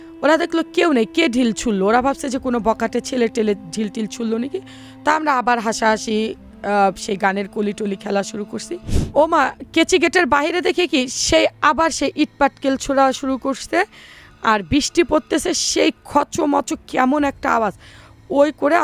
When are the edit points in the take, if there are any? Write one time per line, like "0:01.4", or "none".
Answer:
0:08.9